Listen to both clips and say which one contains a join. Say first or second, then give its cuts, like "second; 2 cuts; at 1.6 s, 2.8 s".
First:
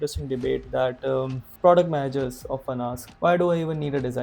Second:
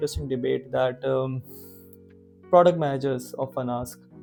first; 2 cuts; at 1.4 s, 3.0 s